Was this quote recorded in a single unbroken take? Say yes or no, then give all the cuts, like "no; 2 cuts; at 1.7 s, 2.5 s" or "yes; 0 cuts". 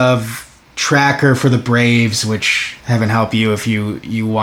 no; 1 cut; at 2.6 s